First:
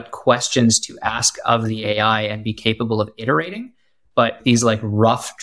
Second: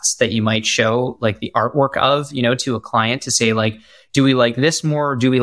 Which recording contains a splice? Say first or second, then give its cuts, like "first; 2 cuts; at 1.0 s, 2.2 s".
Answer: first; 1 cut; at 4.4 s